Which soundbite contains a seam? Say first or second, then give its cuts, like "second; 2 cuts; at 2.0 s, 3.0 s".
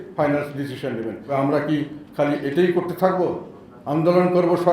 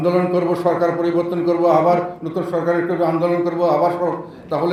first; 1 cut; at 1.3 s